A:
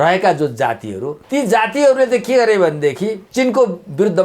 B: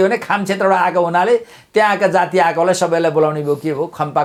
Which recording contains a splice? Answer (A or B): A